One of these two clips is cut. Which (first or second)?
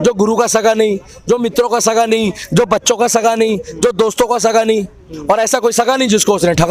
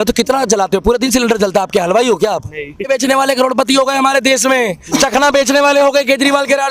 second